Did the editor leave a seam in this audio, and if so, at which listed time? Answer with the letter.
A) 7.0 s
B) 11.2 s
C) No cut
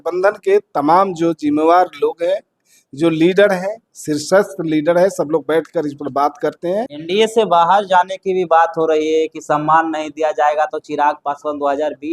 A